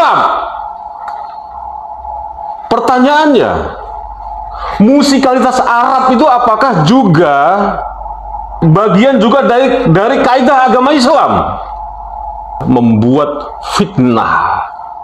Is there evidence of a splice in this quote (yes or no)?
yes